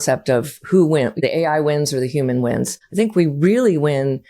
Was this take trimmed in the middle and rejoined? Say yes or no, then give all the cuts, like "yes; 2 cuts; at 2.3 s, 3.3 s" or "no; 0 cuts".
yes; 2 cuts; at 1.2 s, 2.8 s